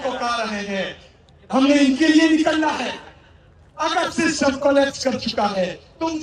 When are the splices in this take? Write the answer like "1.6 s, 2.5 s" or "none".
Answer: none

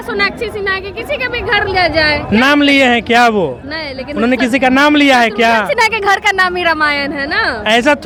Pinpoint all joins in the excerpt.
none

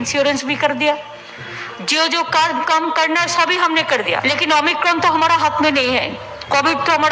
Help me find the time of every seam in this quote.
4.2 s

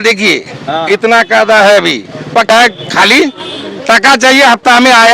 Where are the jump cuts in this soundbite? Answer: 2.5 s

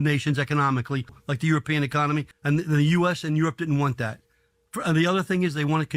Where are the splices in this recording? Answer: 1.2 s, 2.3 s

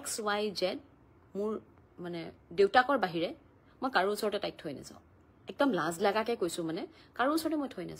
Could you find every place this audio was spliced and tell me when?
none

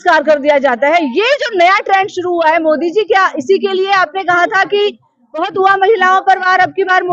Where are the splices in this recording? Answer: none

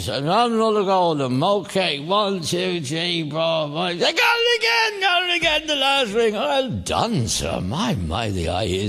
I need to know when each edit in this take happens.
none

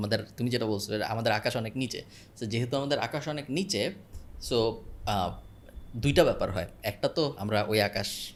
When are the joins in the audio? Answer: none

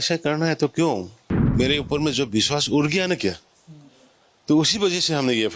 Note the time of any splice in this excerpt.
1.5 s

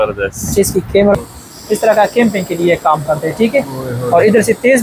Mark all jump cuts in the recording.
1.2 s

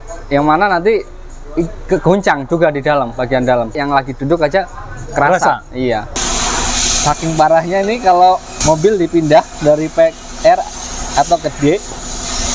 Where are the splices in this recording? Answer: 3.8 s, 6.2 s, 8.5 s

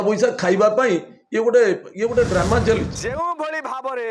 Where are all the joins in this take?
2.9 s

